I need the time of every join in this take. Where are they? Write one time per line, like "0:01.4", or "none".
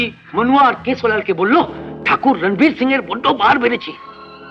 none